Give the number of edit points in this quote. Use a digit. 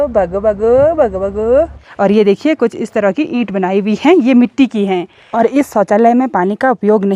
2